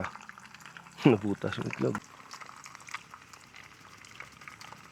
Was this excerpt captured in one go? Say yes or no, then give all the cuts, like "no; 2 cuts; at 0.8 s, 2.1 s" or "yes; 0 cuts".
no; 1 cut; at 2.0 s